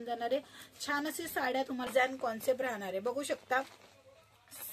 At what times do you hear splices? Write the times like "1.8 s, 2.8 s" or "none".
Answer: 1.9 s

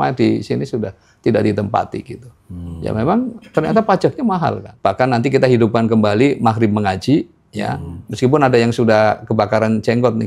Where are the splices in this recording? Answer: 4.7 s

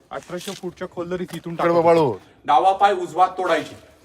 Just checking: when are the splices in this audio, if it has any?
2.2 s

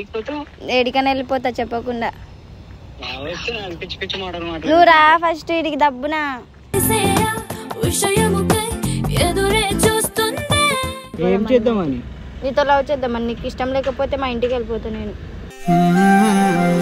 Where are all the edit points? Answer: 11.1 s

